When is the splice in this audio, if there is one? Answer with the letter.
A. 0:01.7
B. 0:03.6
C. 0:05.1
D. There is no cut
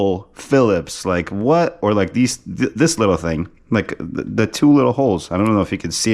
D